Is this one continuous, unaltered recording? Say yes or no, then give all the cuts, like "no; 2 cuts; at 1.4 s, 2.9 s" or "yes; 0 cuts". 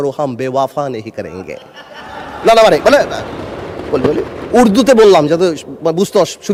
yes; 0 cuts